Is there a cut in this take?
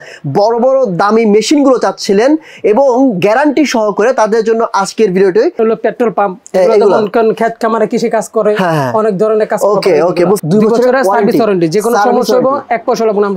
yes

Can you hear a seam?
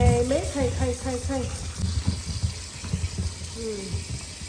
yes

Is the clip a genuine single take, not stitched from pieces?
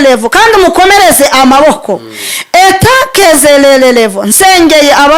yes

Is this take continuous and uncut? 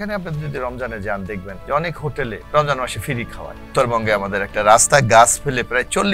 no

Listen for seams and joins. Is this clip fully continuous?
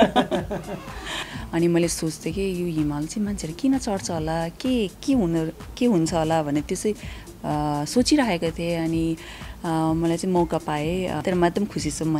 no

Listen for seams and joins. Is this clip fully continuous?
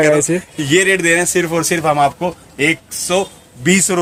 yes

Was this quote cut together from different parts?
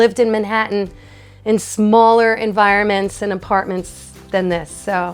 no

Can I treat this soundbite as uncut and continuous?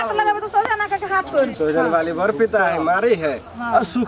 no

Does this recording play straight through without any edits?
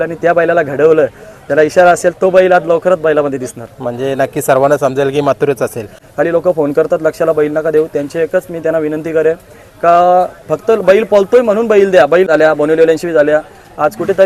no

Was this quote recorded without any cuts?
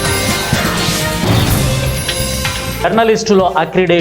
no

